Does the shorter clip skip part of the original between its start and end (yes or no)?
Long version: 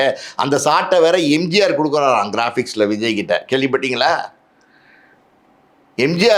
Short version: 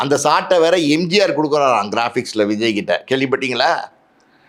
no